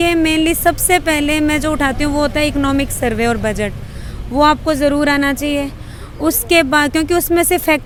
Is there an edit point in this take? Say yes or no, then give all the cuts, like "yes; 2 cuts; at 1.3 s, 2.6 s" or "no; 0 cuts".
no; 0 cuts